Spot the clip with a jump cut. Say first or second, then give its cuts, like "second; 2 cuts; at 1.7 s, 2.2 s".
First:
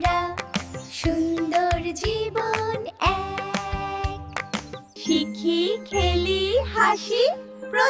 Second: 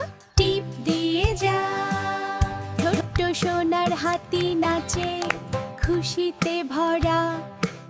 second; 1 cut; at 2.6 s